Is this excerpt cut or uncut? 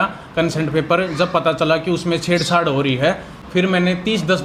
uncut